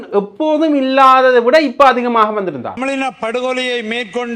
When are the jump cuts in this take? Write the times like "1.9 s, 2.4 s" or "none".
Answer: 2.7 s